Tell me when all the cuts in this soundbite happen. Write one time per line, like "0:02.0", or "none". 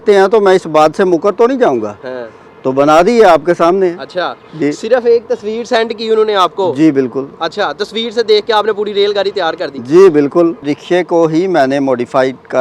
0:10.7